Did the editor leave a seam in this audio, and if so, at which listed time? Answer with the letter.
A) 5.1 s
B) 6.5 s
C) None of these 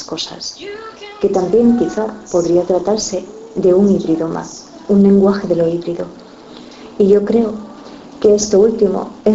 A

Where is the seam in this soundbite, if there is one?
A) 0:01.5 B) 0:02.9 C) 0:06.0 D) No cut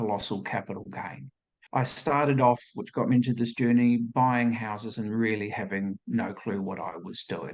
A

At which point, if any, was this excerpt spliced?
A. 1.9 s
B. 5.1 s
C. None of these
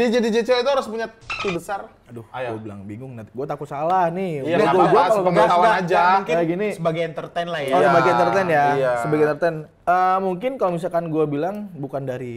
A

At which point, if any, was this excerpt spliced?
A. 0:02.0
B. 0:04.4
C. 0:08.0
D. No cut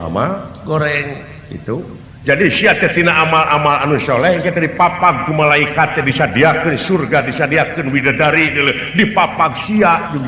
A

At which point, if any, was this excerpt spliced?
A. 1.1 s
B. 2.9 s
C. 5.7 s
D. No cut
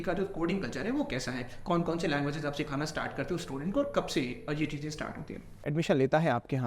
C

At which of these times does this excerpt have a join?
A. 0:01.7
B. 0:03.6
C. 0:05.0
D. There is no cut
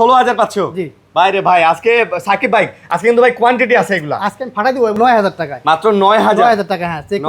C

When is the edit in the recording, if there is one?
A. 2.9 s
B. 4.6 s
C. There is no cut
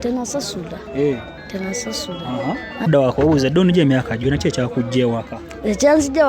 A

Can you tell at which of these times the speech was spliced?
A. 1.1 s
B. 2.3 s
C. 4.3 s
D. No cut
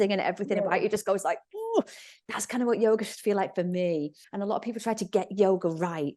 C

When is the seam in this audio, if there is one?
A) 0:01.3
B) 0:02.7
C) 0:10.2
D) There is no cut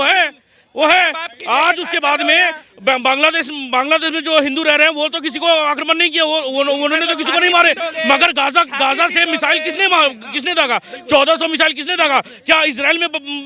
D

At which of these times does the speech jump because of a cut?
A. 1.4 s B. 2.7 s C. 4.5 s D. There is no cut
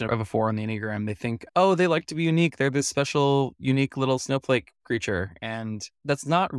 A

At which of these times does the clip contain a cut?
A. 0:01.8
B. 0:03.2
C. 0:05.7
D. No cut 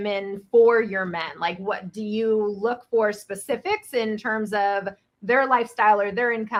D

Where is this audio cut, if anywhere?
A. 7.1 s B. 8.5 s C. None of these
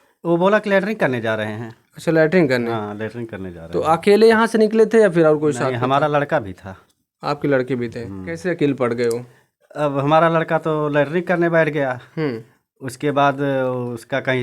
B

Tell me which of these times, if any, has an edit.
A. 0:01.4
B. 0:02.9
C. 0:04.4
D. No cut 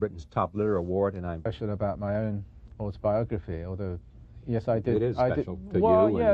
D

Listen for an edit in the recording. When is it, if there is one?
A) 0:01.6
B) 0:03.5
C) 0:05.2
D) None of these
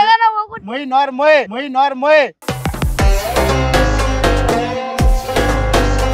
C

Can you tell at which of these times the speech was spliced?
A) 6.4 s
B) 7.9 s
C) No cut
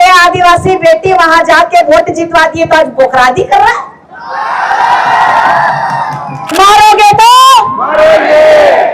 A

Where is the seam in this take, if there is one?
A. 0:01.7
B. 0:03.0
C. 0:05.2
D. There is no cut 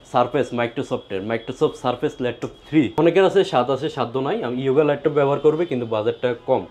B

